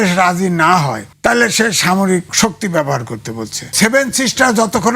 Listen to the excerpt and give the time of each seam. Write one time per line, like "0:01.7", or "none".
0:01.0
0:02.3
0:03.7